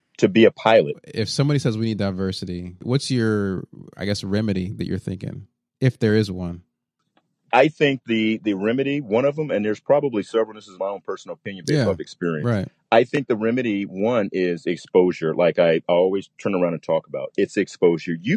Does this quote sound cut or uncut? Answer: cut